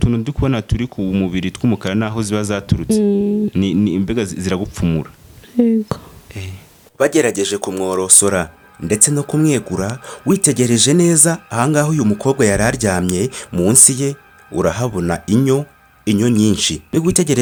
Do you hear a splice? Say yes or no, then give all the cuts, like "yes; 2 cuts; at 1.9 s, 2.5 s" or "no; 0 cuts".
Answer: no; 0 cuts